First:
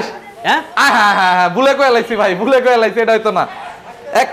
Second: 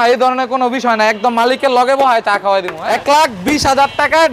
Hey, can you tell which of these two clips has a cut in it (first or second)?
second